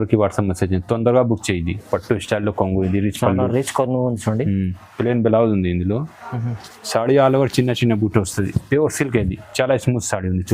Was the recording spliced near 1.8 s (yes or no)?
yes